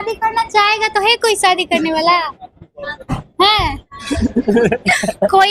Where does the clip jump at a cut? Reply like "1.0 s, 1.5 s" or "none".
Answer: none